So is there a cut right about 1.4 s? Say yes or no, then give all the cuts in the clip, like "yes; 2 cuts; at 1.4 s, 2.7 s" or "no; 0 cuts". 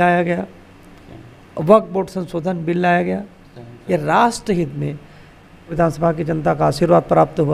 no; 1 cut; at 5.7 s